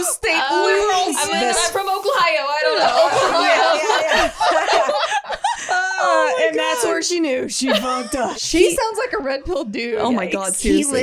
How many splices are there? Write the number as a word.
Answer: two